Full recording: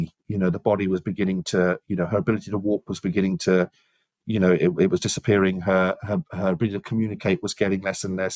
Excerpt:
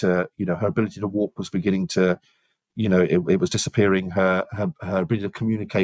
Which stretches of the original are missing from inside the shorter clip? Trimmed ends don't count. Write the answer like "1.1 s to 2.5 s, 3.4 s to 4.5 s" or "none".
none